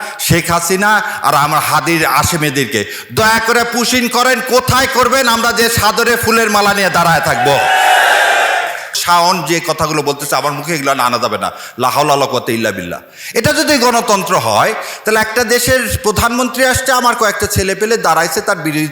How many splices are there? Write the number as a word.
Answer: one